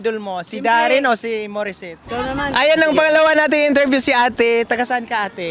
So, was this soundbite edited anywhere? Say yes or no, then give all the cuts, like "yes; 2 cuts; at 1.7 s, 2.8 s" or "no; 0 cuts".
yes; 1 cut; at 2.0 s